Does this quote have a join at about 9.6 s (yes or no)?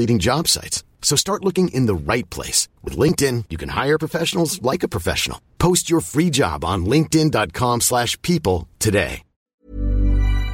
yes